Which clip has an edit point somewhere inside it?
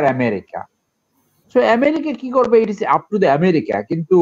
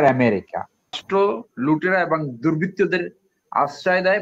second; 1 cut; at 1.0 s

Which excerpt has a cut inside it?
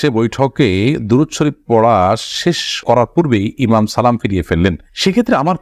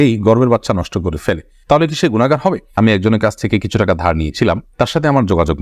second; 1 cut; at 2.8 s

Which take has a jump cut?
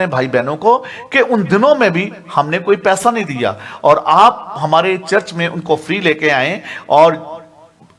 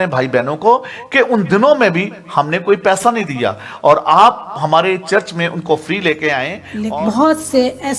second; 1 cut; at 6.6 s

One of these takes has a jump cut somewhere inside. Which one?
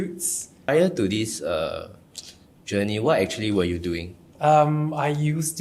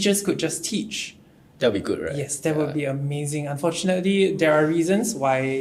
first; 2 cuts; at 0.7 s, 4.2 s

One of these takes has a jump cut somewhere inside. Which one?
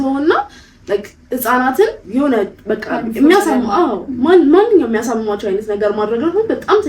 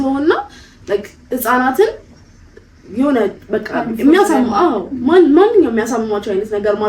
first; 1 cut; at 2.0 s

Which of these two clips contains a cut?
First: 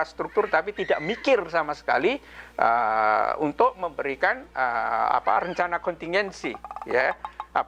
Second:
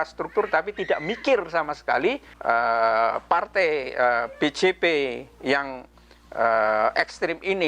second; 1 cut; at 2.3 s

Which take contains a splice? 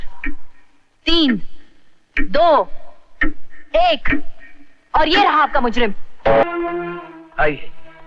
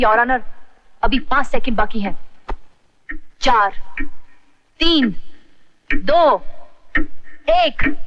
first; 1 cut; at 6.4 s

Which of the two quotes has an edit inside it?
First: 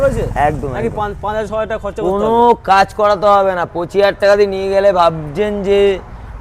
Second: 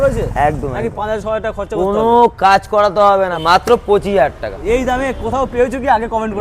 second; 3 cuts; at 1.0 s, 3.4 s, 4.6 s

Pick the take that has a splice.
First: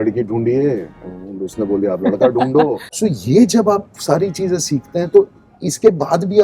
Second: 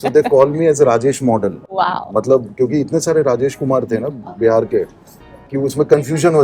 first; 1 cut; at 2.9 s

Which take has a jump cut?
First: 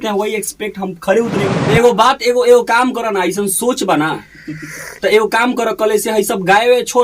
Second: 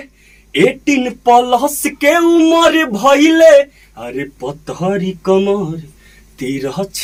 first; 1 cut; at 1.5 s

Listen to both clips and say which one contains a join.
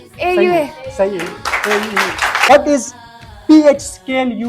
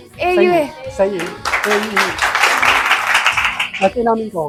first; 1 cut; at 2.5 s

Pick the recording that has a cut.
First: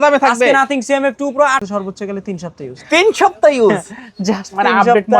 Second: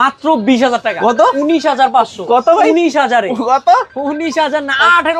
first; 1 cut; at 1.7 s

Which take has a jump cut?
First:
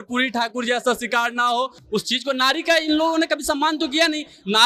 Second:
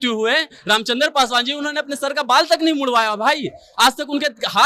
first; 1 cut; at 1.8 s

